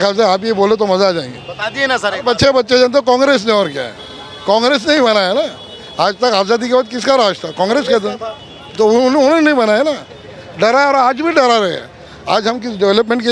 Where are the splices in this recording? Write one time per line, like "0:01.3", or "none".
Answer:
none